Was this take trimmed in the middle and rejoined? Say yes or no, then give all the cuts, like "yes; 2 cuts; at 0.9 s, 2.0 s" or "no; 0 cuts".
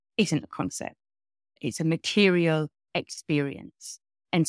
yes; 1 cut; at 1.6 s